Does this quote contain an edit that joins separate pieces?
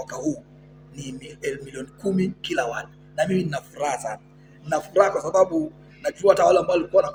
no; 0 cuts

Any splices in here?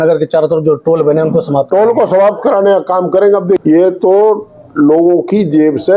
yes; 1 cut; at 3.6 s

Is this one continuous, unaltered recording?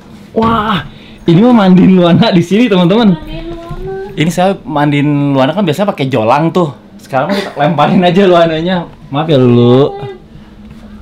yes; 0 cuts

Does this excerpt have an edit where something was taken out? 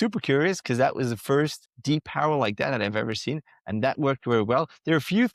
yes; 1 cut; at 1.7 s

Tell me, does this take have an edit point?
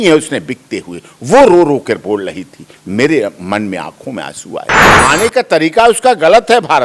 yes; 1 cut; at 4.8 s

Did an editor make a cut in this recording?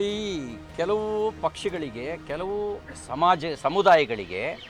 no; 0 cuts

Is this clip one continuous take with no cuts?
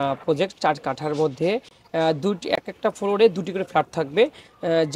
yes; 0 cuts

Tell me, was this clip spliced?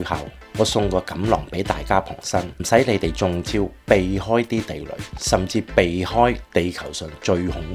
yes; 2 cuts; at 2.5 s, 6.4 s

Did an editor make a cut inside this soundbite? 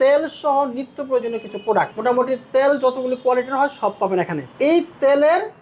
yes; 2 cuts; at 1.9 s, 4.4 s

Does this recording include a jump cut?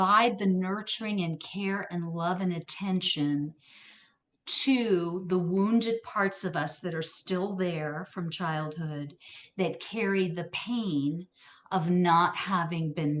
no; 0 cuts

